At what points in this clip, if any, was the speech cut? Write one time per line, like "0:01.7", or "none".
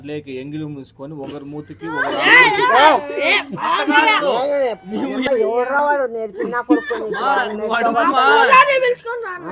0:05.2